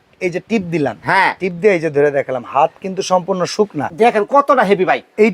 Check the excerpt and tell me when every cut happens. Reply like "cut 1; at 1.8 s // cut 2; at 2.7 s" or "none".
cut 1; at 3.8 s